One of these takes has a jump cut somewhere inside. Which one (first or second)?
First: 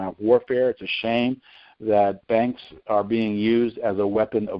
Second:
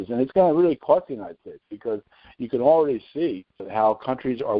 second